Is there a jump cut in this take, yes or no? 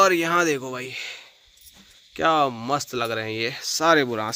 no